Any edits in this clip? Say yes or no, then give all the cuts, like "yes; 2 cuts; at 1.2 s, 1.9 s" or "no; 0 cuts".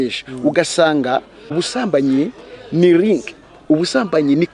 yes; 1 cut; at 1.4 s